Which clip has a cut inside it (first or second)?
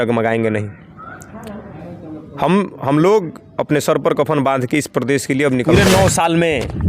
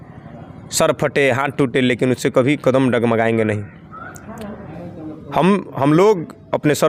first